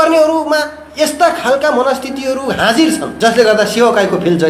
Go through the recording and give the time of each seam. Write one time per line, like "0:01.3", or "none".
0:03.1